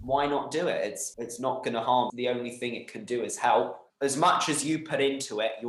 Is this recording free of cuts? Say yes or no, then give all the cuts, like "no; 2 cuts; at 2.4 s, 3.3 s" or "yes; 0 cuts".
no; 3 cuts; at 1.1 s, 2.1 s, 3.8 s